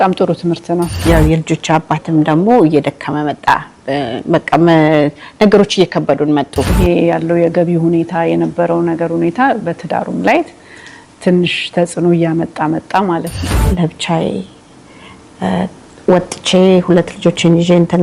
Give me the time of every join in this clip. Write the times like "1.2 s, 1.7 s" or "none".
1.0 s, 6.7 s, 13.4 s